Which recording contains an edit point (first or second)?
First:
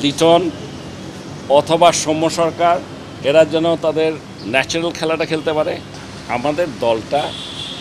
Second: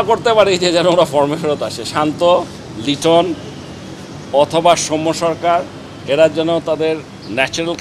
first